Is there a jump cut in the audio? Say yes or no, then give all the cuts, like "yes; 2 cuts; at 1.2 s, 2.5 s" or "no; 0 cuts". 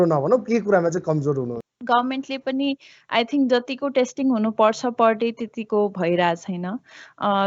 yes; 1 cut; at 1.5 s